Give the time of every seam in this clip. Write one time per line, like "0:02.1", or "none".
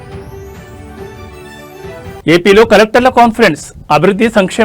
0:02.2